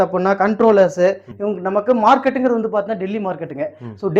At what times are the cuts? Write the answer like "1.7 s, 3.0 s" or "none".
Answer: 1.3 s